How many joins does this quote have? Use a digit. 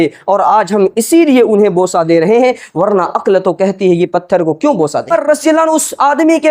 1